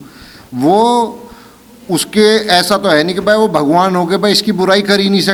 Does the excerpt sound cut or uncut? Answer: uncut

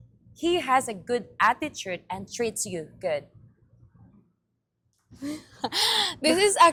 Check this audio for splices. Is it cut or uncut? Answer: uncut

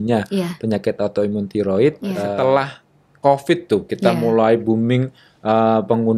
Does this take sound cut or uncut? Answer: cut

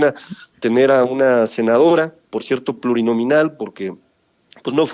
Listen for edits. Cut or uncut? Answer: uncut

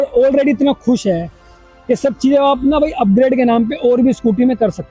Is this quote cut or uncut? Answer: uncut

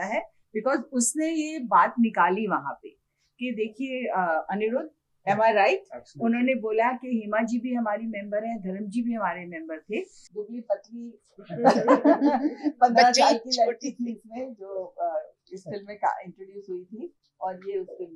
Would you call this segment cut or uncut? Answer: cut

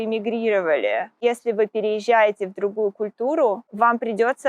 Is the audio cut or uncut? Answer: cut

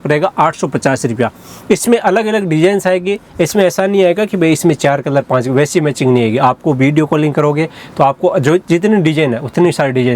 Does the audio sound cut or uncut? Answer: uncut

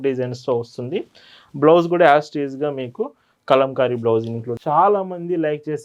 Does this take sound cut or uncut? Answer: cut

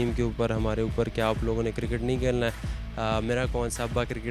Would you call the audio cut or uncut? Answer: uncut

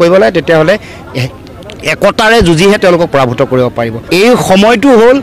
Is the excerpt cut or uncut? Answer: cut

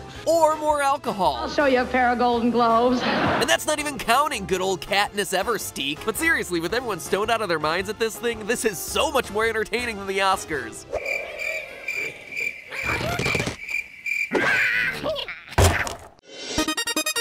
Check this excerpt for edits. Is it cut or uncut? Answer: uncut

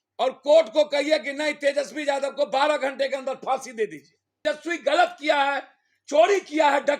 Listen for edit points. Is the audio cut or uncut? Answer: cut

